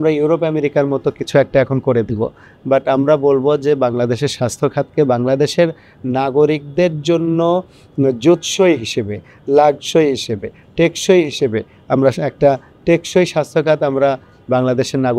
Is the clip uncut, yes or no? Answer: yes